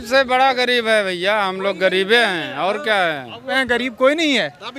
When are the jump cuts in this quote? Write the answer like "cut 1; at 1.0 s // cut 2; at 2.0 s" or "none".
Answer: cut 1; at 3.6 s